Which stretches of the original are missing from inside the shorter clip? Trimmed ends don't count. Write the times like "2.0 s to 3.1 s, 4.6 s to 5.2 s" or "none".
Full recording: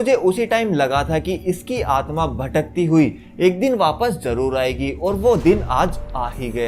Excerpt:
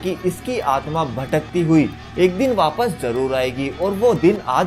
none